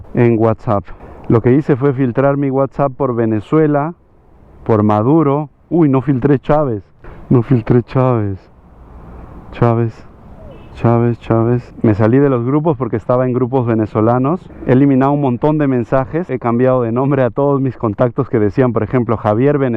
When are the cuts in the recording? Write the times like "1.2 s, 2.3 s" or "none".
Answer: 6.9 s, 11.7 s, 14.5 s, 16.3 s